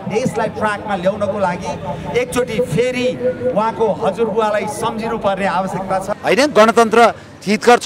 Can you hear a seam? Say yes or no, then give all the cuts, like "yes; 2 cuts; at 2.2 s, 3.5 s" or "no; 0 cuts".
yes; 1 cut; at 6.1 s